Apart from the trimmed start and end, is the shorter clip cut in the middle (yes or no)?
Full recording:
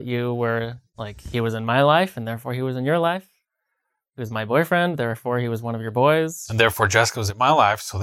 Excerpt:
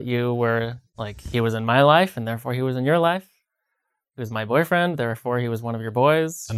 no